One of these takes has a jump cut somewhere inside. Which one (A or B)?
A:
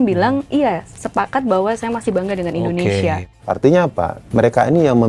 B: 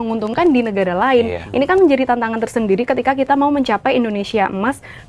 A